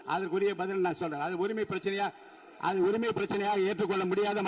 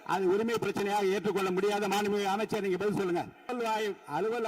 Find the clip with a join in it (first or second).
second